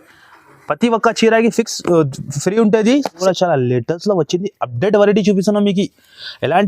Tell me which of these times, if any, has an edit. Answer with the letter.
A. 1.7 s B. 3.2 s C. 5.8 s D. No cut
B